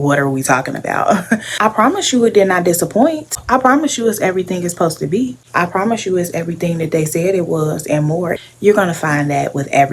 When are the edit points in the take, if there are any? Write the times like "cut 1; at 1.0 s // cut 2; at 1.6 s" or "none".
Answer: cut 1; at 1.5 s // cut 2; at 8.4 s